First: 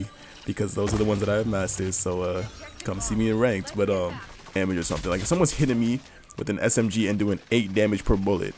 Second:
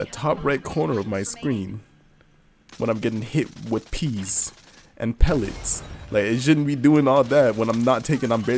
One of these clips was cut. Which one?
first; 1 cut; at 4.6 s

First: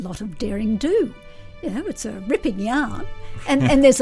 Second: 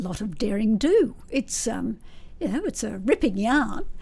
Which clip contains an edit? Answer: first; 1 cut; at 1.2 s

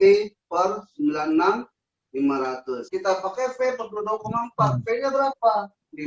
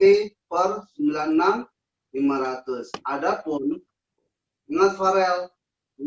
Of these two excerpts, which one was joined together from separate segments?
first; 1 cut; at 2.8 s

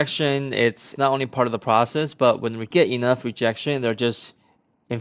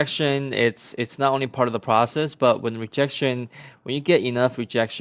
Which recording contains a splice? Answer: first; 2 cuts; at 0.9 s, 2.7 s

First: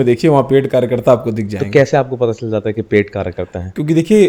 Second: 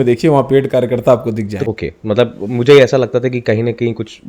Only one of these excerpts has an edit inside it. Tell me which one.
second; 1 cut; at 1.7 s

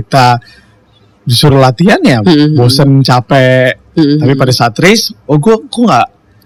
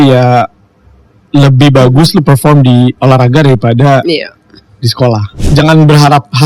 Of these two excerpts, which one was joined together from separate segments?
second; 1 cut; at 5.4 s

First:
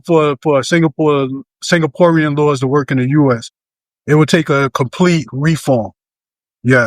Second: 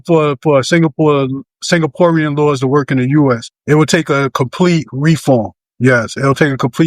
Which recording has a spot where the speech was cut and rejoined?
second; 2 cuts; at 3.5 s, 5.6 s

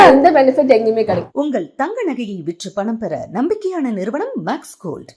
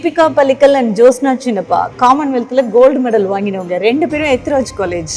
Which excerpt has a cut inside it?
first; 1 cut; at 1.2 s

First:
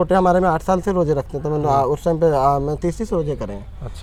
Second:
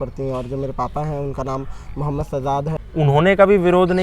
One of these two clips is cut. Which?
second; 1 cut; at 2.8 s

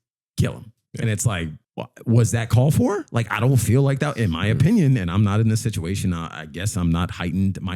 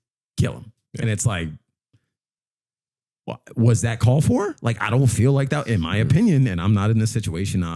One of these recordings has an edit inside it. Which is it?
first; 1 cut; at 1.6 s

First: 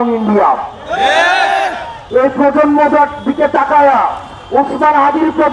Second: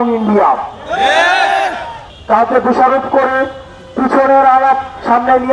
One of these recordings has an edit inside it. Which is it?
second; 1 cut; at 2.0 s

